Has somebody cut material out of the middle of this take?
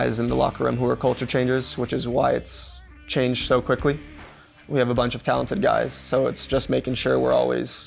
no; 0 cuts

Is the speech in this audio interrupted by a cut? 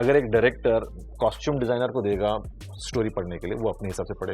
yes; 1 cut; at 1.1 s

